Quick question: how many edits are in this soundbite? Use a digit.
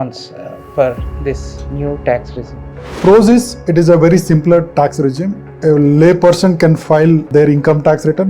3